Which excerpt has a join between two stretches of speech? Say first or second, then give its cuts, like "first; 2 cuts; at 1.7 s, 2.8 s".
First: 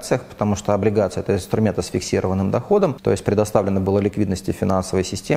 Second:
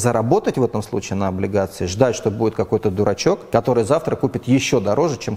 first; 1 cut; at 3.0 s